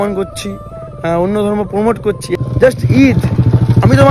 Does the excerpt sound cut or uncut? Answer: cut